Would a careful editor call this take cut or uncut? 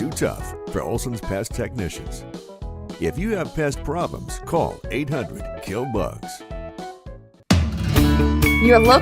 cut